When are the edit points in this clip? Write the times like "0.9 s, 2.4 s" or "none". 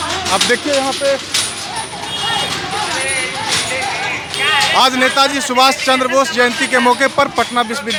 none